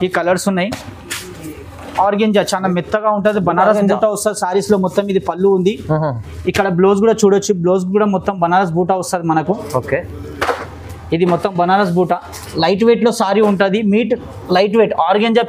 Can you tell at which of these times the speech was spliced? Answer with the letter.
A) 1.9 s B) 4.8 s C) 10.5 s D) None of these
A